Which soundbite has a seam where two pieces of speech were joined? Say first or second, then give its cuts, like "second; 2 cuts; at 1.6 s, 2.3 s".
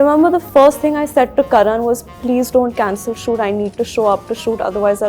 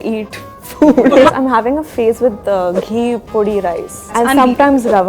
second; 2 cuts; at 1.3 s, 4.1 s